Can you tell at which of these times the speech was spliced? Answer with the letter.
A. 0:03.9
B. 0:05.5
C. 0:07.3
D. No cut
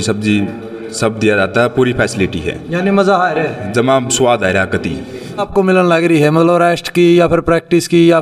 B